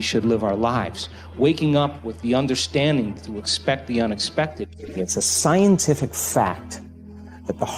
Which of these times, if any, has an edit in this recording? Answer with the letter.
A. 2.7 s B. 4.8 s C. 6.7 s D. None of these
B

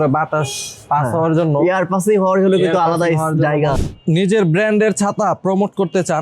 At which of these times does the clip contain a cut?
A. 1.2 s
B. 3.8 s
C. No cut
B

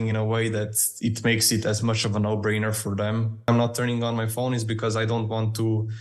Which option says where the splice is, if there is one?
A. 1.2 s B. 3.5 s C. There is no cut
B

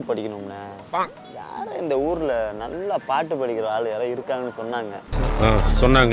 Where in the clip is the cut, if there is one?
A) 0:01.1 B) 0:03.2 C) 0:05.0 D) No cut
C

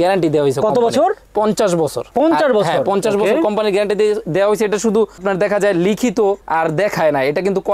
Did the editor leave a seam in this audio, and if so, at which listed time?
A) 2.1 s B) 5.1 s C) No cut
C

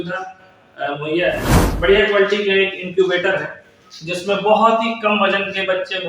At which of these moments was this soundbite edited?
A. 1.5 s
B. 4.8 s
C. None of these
A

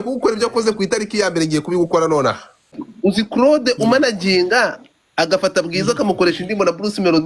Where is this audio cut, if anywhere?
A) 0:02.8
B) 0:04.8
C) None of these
A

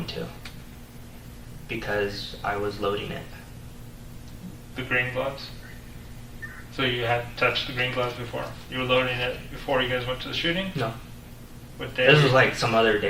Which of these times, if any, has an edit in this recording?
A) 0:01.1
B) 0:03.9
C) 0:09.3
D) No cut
D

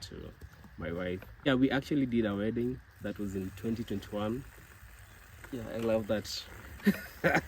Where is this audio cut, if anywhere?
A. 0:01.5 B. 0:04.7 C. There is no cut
A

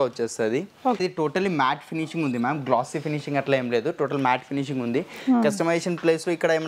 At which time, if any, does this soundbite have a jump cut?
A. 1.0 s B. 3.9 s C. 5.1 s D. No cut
A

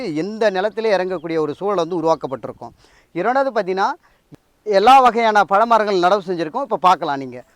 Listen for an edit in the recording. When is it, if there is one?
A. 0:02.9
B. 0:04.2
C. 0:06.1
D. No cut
B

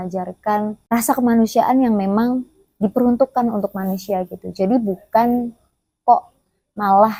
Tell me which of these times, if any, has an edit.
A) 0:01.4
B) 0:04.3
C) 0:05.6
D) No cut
D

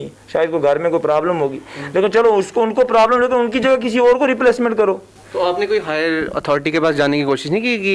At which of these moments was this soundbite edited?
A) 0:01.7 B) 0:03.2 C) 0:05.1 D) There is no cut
D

